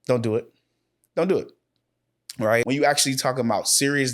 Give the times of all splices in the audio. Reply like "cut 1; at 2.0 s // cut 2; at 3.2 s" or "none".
cut 1; at 2.6 s

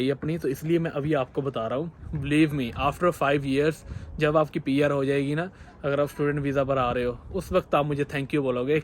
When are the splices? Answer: cut 1; at 2.0 s

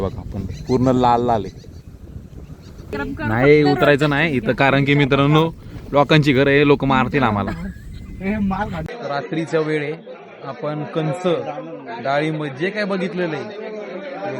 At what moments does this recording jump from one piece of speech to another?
cut 1; at 2.9 s // cut 2; at 8.9 s

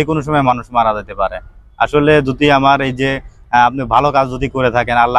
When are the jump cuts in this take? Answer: none

